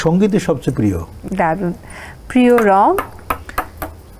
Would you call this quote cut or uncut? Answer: uncut